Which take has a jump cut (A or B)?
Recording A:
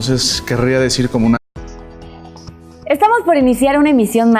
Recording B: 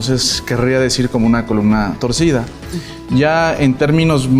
B